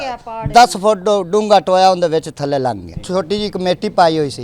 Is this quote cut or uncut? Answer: cut